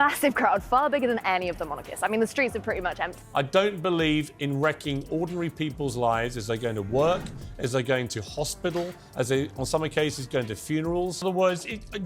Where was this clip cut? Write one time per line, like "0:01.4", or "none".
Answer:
0:03.2
0:11.2